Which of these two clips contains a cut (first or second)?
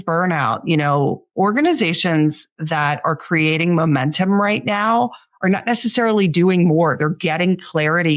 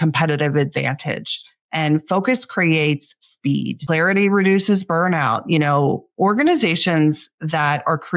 second